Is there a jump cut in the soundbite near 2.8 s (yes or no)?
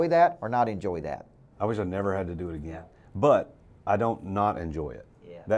yes